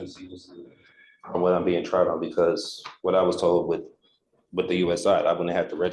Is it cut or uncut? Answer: uncut